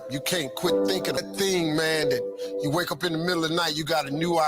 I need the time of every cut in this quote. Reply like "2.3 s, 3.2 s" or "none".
1.2 s